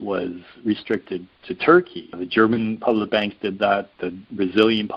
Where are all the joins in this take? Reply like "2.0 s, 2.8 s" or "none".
2.2 s